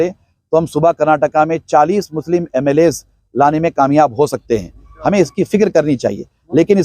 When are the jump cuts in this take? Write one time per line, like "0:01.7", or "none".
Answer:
none